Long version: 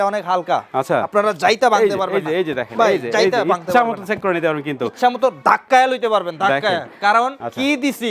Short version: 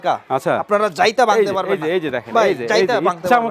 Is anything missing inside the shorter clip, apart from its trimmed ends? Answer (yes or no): no